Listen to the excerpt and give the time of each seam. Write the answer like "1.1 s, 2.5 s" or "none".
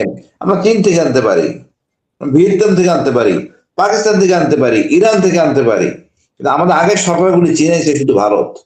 none